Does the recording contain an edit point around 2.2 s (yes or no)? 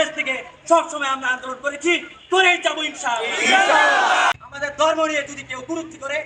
no